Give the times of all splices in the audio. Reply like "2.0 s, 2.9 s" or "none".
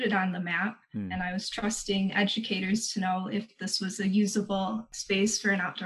4.9 s